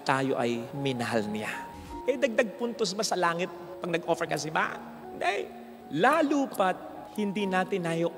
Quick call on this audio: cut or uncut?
cut